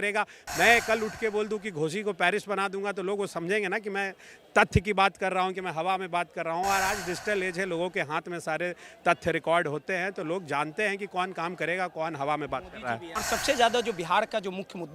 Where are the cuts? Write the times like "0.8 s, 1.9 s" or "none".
13.1 s